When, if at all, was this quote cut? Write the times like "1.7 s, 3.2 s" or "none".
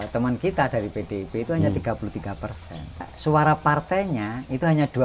3.1 s

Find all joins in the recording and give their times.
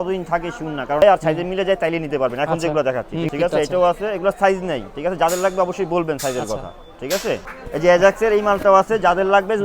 1.0 s, 3.3 s, 7.5 s

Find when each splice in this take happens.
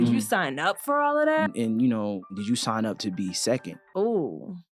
1.5 s, 2.4 s, 3.8 s

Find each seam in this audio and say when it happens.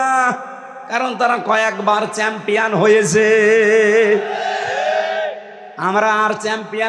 none

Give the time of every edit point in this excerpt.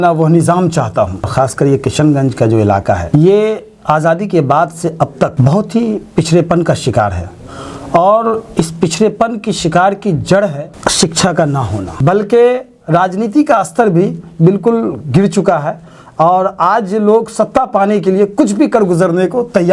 1.3 s, 11.8 s

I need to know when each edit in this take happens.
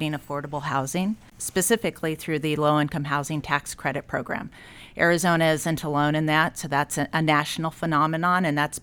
none

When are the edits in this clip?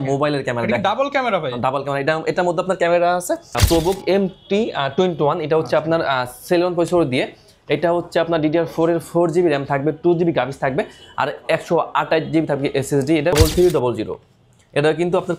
3.6 s, 13.3 s

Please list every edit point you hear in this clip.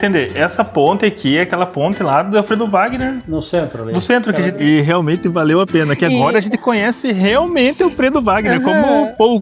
4.5 s

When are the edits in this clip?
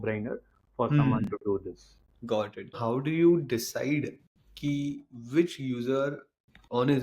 2.8 s

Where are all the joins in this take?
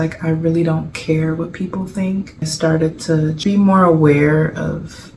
2.5 s

